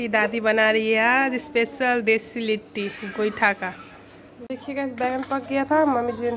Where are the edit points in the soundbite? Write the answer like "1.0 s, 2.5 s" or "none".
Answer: 4.5 s